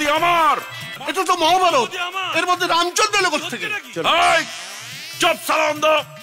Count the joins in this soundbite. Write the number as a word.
one